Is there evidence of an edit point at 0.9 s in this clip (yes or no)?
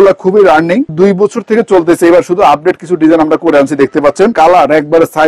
yes